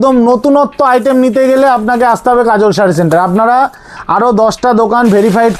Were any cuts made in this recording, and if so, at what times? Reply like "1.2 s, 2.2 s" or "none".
none